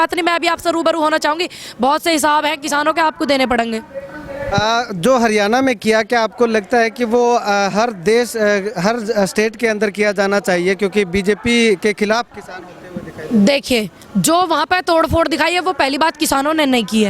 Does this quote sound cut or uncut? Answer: uncut